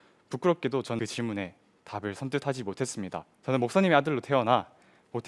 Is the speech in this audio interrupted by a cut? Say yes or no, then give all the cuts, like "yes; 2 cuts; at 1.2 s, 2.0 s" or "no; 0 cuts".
yes; 1 cut; at 1.0 s